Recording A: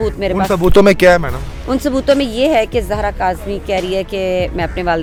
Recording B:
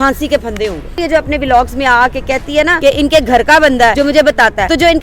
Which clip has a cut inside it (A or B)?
B